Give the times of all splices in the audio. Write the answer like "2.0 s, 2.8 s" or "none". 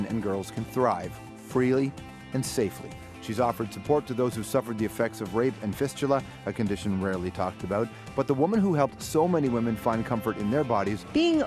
6.4 s